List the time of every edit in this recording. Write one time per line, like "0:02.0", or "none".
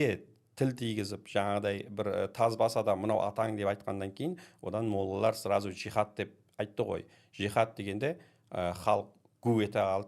none